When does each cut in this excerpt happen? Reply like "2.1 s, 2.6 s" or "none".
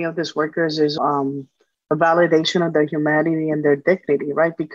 1.0 s